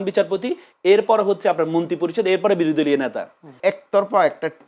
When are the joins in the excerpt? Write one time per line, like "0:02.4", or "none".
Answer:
0:03.6